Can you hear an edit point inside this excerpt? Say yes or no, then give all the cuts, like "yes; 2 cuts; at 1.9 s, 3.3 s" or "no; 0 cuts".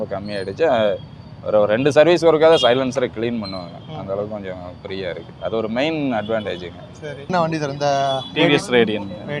yes; 1 cut; at 7.3 s